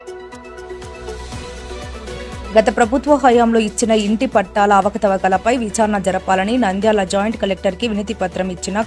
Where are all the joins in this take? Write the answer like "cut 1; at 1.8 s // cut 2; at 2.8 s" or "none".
cut 1; at 0.9 s